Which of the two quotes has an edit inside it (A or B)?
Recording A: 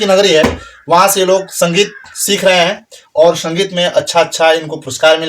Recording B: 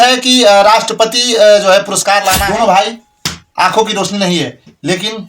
B